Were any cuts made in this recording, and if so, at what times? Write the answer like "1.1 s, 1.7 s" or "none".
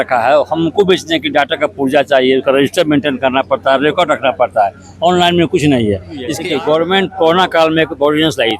6.3 s